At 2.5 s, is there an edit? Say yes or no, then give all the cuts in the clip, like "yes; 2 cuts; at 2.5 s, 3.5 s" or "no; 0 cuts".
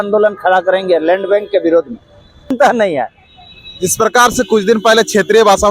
yes; 1 cut; at 2.5 s